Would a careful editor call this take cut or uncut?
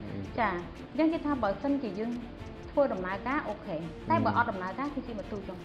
uncut